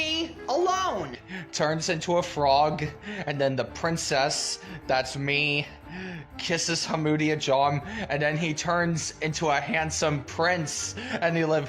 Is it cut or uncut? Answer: cut